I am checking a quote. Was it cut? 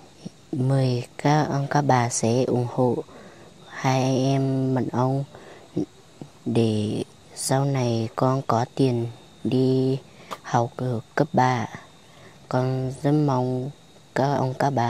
no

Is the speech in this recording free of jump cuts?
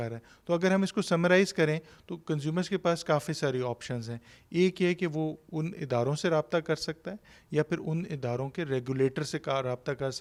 yes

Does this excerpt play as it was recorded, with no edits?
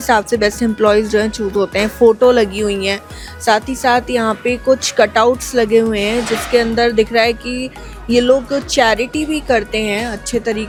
yes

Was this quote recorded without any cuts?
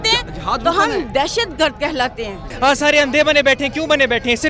no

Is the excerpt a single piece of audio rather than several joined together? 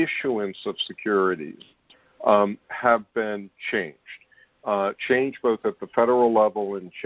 yes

